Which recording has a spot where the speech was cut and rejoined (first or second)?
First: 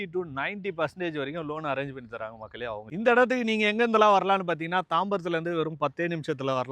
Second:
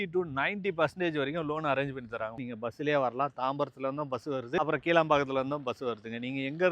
second